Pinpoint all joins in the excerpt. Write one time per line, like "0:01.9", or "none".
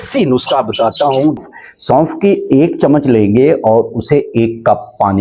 0:01.4

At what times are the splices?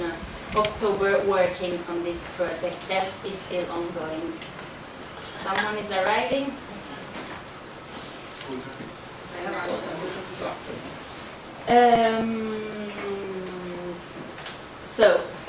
0:12.6

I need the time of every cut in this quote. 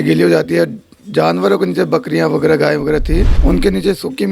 0:03.3

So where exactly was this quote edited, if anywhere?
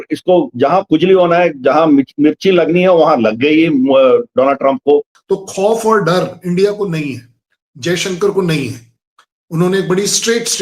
0:05.1

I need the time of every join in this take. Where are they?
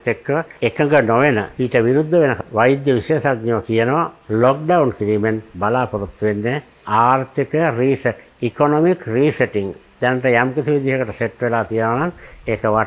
0:01.5
0:02.4
0:04.2
0:05.5
0:09.8

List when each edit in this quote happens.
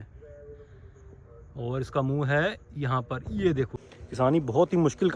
0:03.8

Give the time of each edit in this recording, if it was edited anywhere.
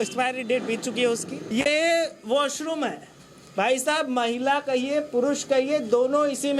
0:01.4

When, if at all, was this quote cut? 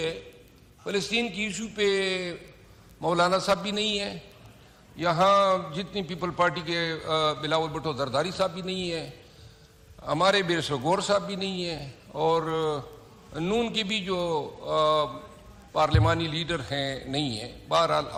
none

